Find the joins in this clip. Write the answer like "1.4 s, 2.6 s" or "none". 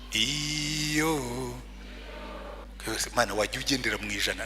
2.6 s